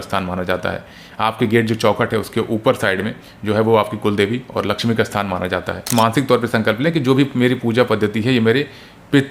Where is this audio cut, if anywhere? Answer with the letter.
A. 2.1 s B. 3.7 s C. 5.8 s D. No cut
C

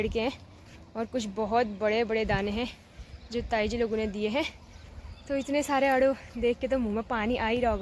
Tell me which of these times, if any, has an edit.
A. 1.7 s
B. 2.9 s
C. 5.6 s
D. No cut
D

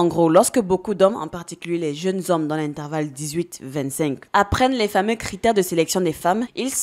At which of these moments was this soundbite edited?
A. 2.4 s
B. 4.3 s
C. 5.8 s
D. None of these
B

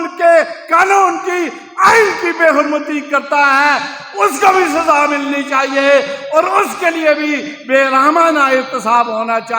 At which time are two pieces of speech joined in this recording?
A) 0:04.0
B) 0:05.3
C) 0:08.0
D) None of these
D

